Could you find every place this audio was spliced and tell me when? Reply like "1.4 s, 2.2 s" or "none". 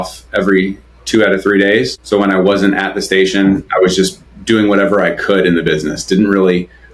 2.0 s